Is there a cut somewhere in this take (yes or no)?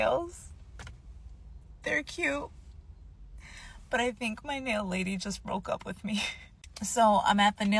no